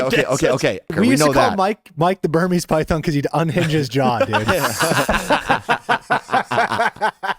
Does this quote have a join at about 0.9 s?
yes; 1 cut; at 0.9 s

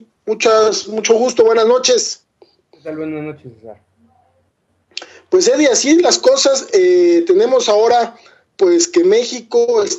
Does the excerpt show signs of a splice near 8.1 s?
no; 1 cut; at 2.1 s

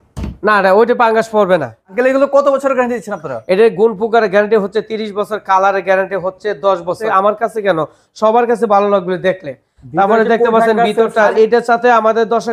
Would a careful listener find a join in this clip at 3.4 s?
no; 3 cuts; at 1.9 s, 7.0 s, 11.3 s

